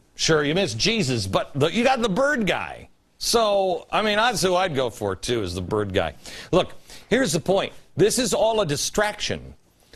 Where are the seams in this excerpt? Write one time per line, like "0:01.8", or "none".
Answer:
0:08.8

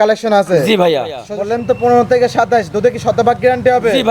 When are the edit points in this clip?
0:01.3

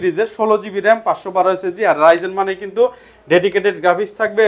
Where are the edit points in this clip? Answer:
none

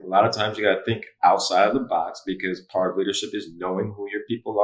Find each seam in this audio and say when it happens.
none

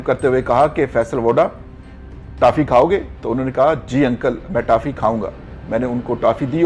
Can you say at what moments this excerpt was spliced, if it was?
none

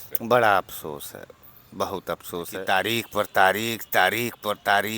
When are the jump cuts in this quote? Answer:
0:02.6

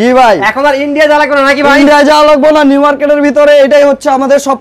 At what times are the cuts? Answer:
none

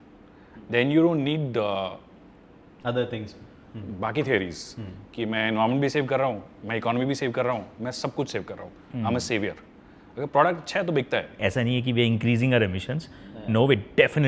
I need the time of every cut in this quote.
0:11.4

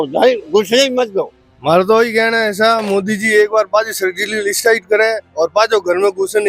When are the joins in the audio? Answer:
0:01.5

